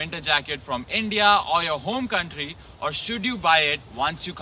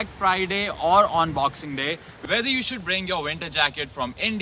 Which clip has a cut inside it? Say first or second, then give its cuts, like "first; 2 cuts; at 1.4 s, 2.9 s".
second; 1 cut; at 2.1 s